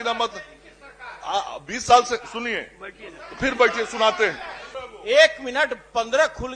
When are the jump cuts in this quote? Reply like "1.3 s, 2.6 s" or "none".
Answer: 4.9 s